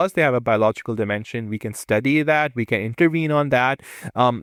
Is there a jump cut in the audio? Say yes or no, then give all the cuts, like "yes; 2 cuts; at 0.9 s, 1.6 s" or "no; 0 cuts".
no; 0 cuts